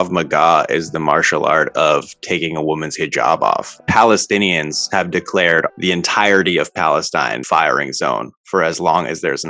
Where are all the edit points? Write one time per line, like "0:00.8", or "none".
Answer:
0:03.8
0:05.7
0:07.4